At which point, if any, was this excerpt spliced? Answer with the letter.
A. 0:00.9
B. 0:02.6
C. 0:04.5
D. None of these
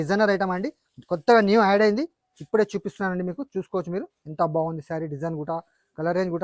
D